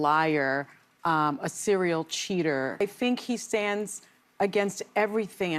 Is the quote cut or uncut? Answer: cut